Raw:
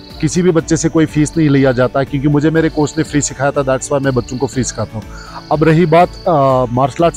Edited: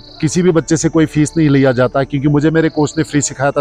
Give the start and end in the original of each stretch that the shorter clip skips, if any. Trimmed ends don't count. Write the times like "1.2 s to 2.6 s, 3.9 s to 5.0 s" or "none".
none